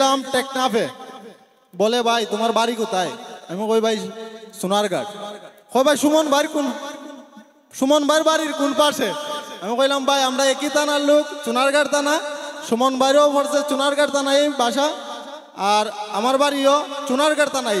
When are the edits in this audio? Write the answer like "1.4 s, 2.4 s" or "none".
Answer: none